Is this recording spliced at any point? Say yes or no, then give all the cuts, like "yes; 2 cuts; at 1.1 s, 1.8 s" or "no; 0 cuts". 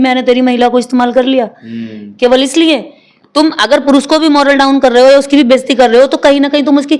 no; 0 cuts